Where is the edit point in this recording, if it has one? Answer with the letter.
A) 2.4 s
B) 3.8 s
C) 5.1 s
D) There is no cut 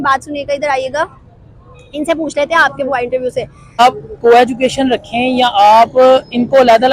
B